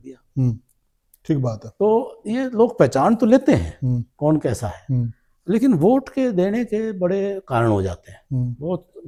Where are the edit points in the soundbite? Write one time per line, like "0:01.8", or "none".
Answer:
none